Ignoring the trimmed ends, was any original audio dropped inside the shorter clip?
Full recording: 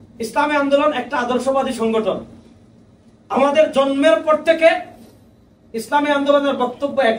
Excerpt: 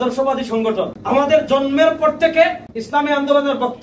yes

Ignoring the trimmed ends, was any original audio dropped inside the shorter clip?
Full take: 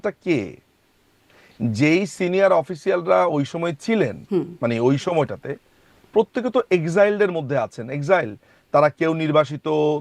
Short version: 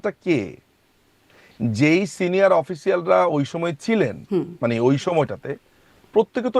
no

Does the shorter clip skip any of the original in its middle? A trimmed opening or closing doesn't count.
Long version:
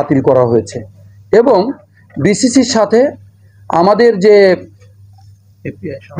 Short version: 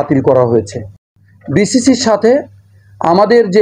yes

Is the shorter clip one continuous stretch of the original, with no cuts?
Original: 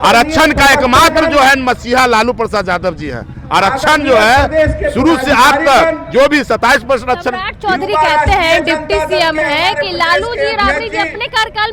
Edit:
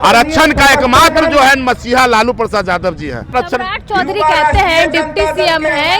no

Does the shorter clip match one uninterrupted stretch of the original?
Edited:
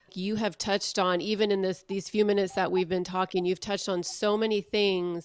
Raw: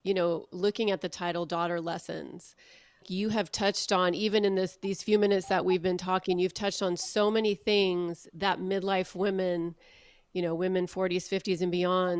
yes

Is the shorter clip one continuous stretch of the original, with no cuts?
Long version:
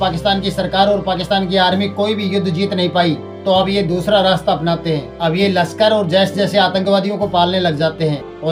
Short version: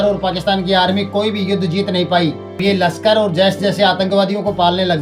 no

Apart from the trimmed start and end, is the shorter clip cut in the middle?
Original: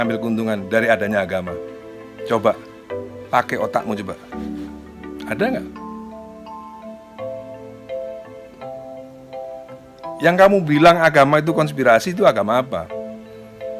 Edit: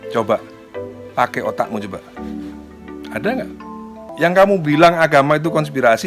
yes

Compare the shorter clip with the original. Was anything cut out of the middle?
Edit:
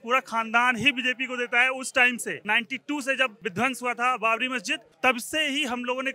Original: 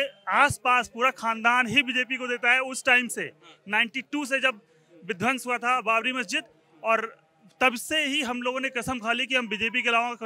yes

